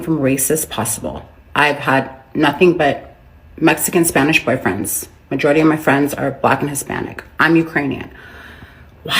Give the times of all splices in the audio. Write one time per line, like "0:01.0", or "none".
none